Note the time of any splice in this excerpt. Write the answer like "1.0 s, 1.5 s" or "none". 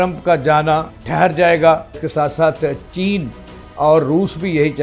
1.0 s, 2.0 s